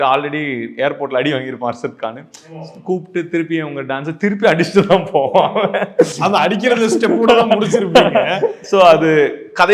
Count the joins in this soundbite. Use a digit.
0